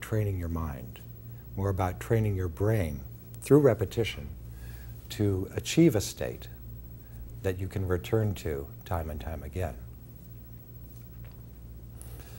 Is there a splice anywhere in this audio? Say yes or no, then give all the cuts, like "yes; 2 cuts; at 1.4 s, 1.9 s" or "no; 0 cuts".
yes; 1 cut; at 5.1 s